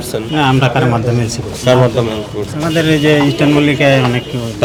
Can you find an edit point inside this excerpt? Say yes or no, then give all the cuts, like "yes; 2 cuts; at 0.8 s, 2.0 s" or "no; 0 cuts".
no; 0 cuts